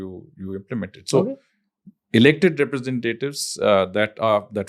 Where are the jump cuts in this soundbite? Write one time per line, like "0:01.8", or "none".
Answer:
none